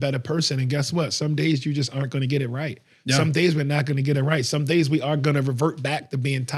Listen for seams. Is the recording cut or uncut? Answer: uncut